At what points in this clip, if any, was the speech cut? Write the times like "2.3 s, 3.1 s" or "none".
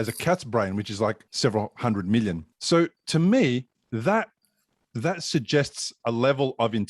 1.3 s, 2.5 s